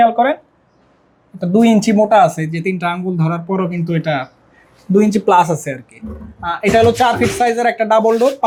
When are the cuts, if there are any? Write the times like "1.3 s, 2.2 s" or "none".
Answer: none

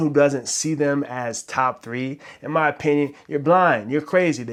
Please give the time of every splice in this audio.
none

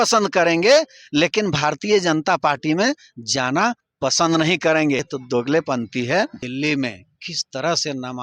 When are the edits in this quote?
5.1 s, 6.4 s

